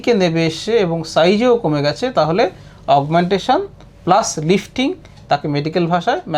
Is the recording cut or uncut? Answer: uncut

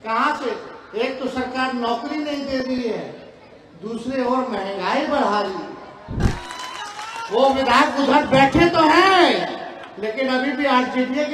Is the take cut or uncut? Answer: cut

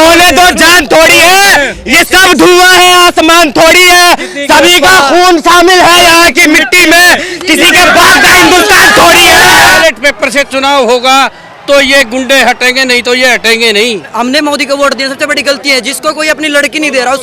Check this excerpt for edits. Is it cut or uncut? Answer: cut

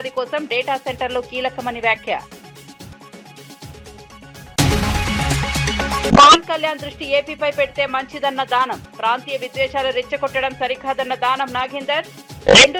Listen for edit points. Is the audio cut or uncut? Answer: uncut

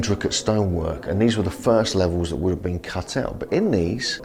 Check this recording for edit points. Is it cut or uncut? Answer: uncut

